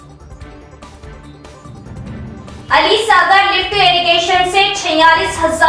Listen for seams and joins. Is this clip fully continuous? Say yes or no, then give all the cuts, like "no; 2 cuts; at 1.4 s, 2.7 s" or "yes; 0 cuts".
no; 1 cut; at 2.2 s